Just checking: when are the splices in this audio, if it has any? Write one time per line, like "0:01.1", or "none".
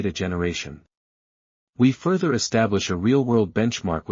none